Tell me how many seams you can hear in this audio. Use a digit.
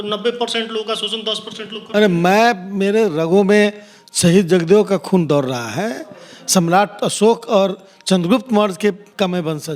0